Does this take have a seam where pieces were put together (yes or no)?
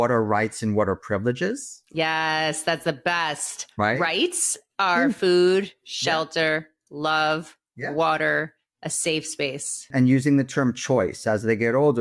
yes